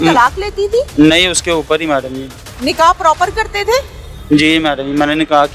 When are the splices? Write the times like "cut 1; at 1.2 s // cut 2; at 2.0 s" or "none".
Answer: none